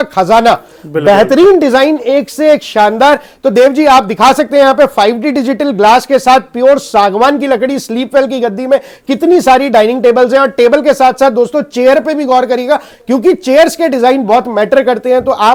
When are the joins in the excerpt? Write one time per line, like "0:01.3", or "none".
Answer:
none